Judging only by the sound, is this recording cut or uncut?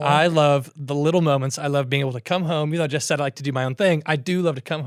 uncut